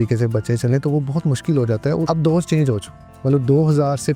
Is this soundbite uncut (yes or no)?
no